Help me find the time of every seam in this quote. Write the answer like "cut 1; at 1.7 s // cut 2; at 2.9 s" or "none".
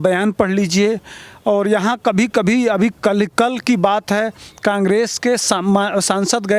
none